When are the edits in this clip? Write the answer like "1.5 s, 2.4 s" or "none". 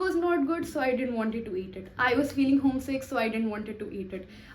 none